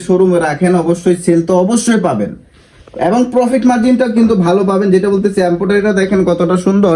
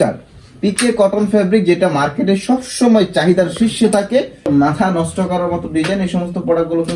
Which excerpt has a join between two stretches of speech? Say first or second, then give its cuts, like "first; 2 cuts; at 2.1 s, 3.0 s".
second; 1 cut; at 4.5 s